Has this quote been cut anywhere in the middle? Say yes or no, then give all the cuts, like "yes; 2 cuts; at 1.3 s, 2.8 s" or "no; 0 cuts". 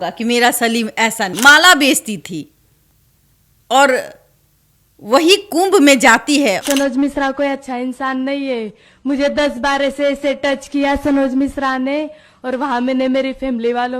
yes; 2 cuts; at 1.3 s, 6.6 s